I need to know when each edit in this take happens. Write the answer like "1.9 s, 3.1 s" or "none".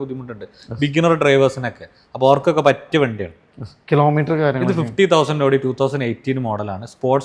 none